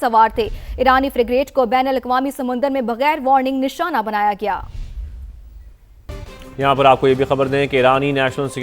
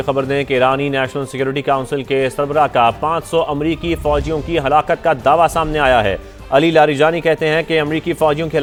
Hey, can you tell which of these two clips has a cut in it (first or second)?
first